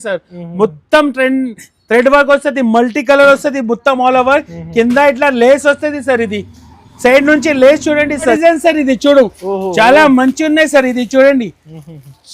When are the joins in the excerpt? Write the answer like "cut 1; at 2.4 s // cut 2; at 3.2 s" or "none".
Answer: cut 1; at 8.4 s